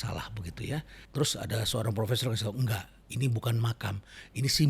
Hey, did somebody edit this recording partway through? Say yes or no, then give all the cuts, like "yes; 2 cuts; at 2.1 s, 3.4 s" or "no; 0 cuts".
yes; 1 cut; at 1.0 s